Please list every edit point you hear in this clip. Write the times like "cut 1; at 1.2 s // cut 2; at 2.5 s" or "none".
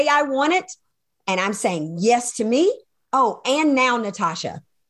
none